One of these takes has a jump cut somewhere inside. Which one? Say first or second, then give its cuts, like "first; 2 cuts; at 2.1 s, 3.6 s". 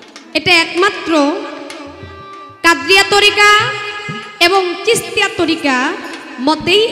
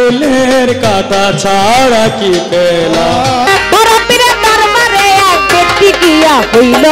second; 1 cut; at 3.5 s